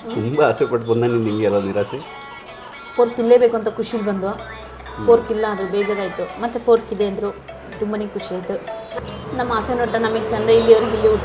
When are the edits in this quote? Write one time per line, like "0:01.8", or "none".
none